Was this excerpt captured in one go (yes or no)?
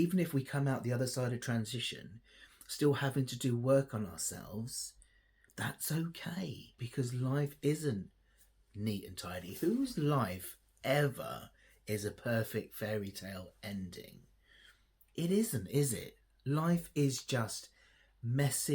no